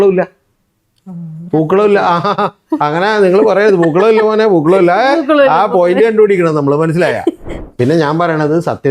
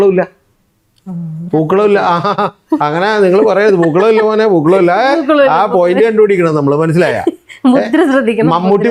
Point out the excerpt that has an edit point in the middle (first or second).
first